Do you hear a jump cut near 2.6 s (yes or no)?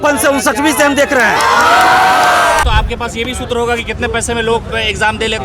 yes